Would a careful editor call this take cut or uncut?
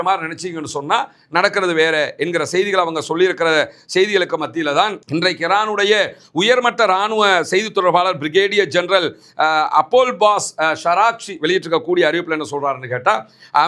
uncut